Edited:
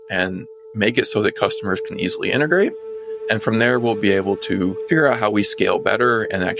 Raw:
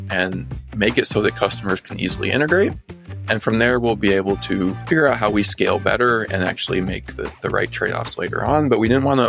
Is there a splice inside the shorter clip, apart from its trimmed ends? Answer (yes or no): no